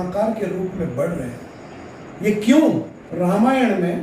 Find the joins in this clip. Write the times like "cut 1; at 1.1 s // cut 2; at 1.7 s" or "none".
cut 1; at 3.0 s

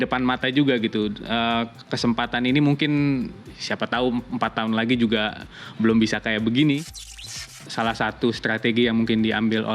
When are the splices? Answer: cut 1; at 7.3 s

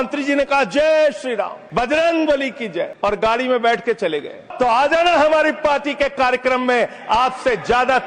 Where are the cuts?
cut 1; at 1.6 s // cut 2; at 2.9 s // cut 3; at 4.4 s

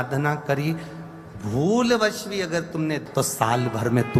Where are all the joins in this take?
cut 1; at 3.1 s

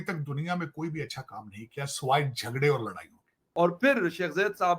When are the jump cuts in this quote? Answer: cut 1; at 3.4 s

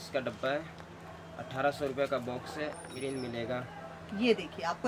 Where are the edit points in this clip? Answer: cut 1; at 2.9 s

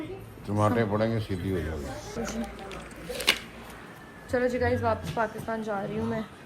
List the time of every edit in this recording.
cut 1; at 2.1 s

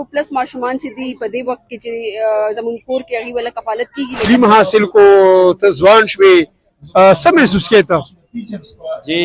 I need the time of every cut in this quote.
cut 1; at 4.3 s

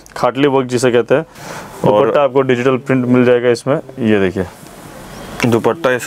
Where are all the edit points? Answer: cut 1; at 1.4 s

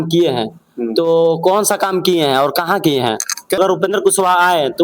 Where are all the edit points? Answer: cut 1; at 3.6 s

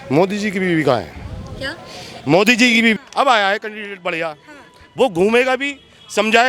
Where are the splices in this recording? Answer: cut 1; at 3.0 s

